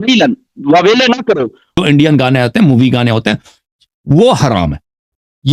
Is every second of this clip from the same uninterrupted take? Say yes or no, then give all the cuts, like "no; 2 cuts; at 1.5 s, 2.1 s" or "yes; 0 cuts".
no; 1 cut; at 1.7 s